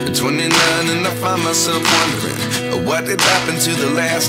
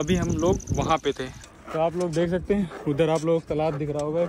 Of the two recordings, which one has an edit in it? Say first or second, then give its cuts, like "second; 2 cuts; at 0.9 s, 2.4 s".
second; 1 cut; at 1.4 s